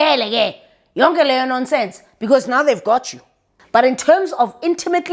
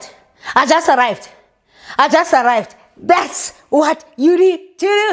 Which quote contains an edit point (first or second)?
first